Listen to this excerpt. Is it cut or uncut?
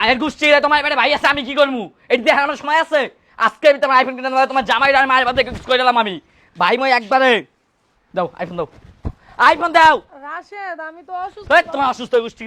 uncut